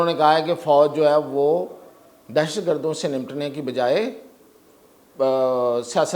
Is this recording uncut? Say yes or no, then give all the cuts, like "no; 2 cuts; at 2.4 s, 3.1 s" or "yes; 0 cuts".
yes; 0 cuts